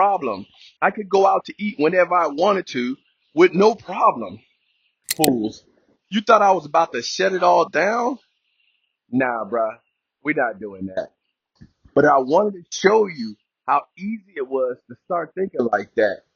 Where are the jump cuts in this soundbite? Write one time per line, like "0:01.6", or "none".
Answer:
0:05.1